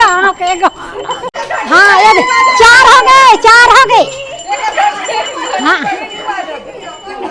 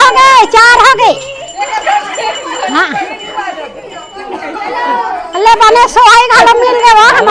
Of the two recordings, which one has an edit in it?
first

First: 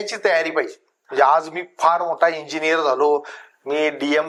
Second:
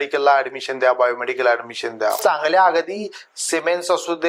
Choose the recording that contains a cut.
second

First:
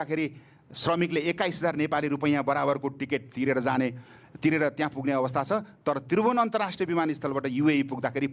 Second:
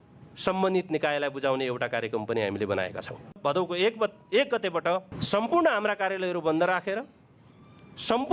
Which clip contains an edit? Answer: second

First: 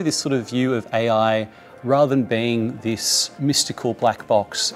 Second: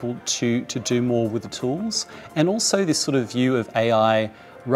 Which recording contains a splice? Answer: first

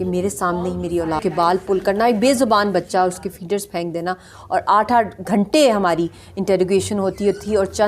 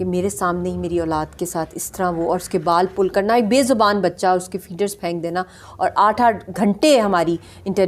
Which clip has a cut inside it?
first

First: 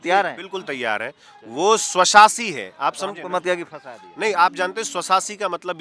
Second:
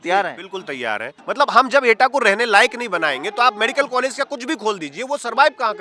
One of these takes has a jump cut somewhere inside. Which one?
second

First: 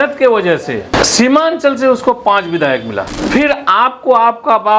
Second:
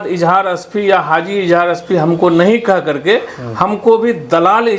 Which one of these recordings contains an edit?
first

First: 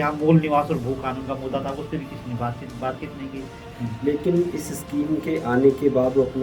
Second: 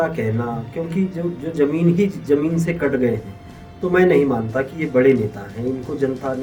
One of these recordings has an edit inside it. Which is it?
first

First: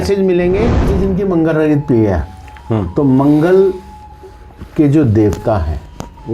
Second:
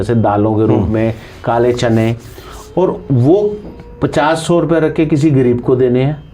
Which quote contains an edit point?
first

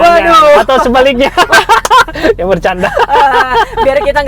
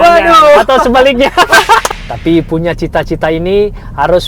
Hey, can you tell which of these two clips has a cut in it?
second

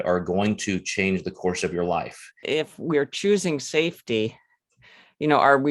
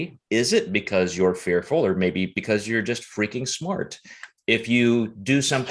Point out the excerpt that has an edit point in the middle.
first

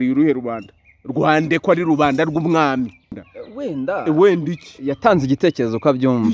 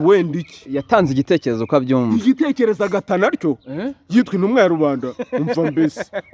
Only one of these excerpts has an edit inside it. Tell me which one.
first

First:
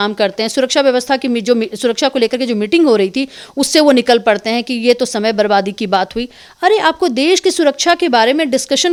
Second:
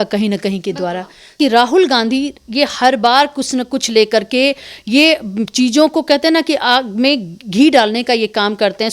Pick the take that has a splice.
second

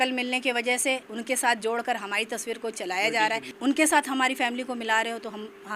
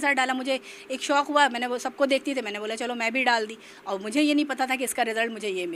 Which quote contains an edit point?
first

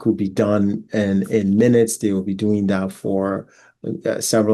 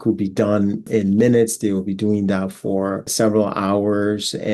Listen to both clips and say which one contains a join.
second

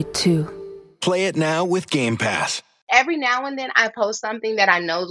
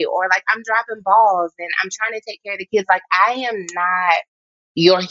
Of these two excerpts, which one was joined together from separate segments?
first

